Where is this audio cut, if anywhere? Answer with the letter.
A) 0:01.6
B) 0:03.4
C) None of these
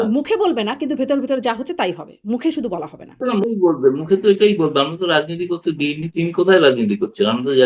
B